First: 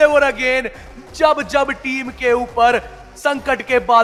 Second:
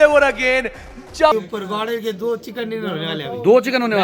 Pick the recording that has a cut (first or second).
second